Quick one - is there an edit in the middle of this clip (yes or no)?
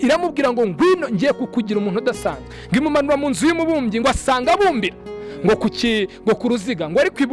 no